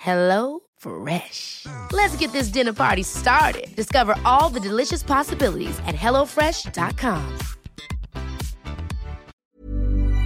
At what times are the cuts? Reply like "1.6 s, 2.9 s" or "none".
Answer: 9.3 s